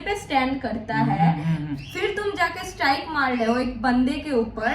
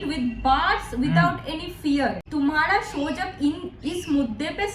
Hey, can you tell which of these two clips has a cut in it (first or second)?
second